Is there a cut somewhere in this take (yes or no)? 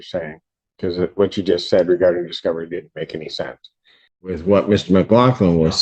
yes